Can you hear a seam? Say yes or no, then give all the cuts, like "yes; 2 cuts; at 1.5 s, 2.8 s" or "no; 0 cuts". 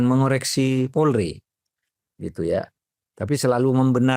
no; 0 cuts